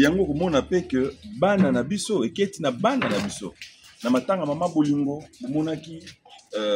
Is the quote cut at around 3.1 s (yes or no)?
no